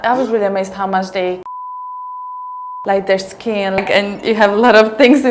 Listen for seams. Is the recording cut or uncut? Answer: cut